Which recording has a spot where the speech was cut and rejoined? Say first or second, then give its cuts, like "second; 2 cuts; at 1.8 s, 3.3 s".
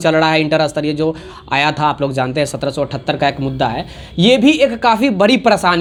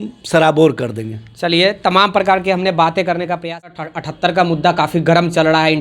second; 1 cut; at 3.7 s